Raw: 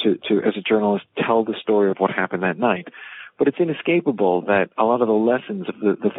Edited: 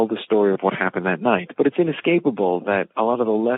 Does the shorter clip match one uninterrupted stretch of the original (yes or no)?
no